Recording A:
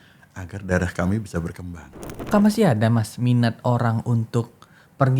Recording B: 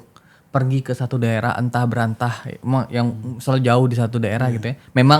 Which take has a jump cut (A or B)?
A